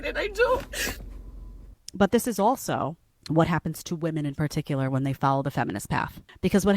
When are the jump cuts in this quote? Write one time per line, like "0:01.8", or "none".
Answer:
0:01.8

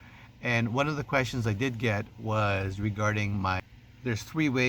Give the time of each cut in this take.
0:03.7

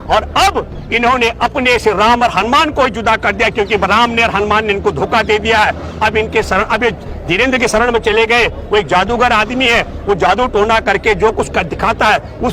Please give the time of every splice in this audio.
none

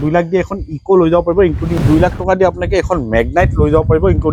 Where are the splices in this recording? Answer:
0:01.8

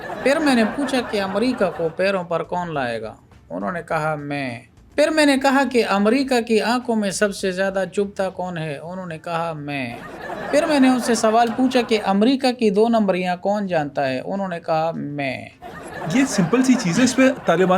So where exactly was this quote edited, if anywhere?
none

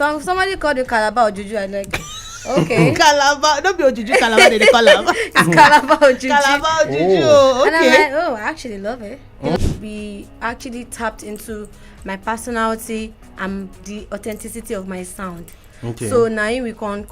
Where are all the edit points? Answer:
0:09.6

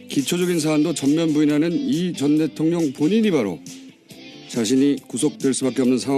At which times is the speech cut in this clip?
0:03.2

